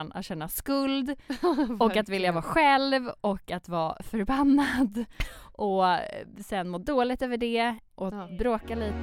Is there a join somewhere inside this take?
yes; 1 cut; at 7.9 s

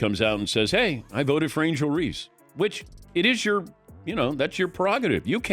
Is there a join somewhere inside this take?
no; 0 cuts

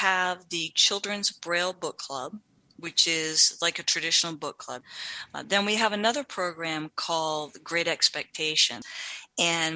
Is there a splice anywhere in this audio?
yes; 2 cuts; at 4.8 s, 8.8 s

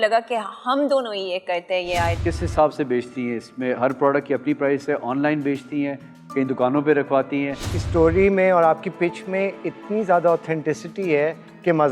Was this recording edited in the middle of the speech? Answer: yes; 2 cuts; at 2.2 s, 7.8 s

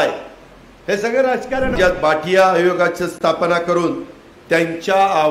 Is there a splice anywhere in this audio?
yes; 1 cut; at 1.8 s

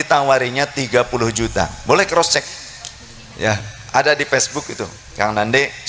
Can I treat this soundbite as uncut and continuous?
yes; 0 cuts

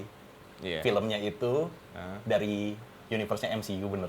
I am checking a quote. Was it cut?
no; 0 cuts

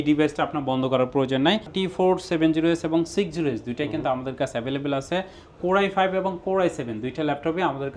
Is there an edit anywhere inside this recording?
yes; 1 cut; at 1.7 s

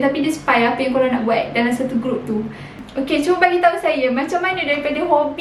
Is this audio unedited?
no; 1 cut; at 2.8 s

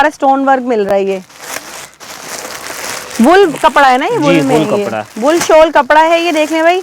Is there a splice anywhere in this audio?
no; 0 cuts

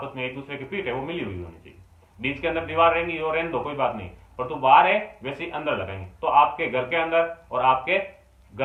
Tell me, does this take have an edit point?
no; 0 cuts

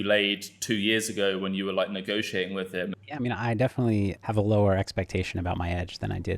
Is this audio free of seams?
no; 2 cuts; at 2.9 s, 4.2 s

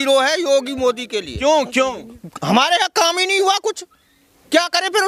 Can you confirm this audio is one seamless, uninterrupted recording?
yes; 0 cuts

